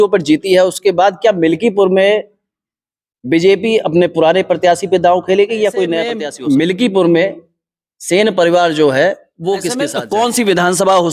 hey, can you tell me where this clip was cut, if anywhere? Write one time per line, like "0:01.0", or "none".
0:06.2
0:09.9